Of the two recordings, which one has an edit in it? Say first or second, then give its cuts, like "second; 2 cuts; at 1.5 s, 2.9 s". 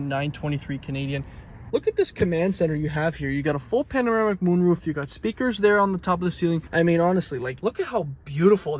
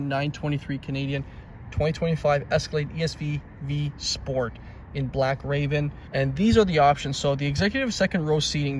first; 3 cuts; at 1.6 s, 6.6 s, 7.4 s